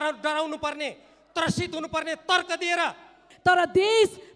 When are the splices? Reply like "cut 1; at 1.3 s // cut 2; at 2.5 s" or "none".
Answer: cut 1; at 3.2 s